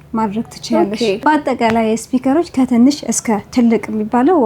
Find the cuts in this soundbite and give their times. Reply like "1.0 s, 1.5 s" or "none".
1.2 s